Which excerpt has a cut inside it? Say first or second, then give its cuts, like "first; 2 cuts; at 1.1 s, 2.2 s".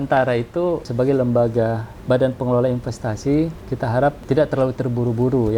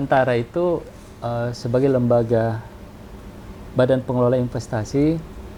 first; 3 cuts; at 0.9 s, 1.9 s, 4.0 s